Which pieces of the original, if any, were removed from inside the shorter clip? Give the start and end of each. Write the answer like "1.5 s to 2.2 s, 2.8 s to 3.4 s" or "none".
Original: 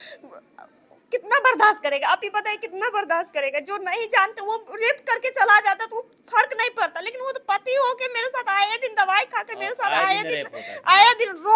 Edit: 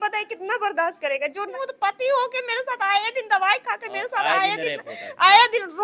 3.8 s to 7.2 s